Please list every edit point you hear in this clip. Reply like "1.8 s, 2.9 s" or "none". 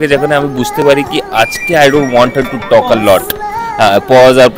none